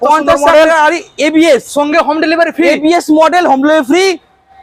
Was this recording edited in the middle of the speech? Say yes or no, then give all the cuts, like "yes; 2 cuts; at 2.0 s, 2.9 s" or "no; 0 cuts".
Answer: no; 0 cuts